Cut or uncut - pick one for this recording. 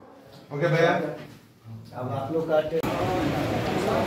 cut